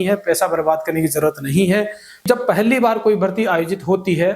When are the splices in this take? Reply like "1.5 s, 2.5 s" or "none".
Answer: 2.2 s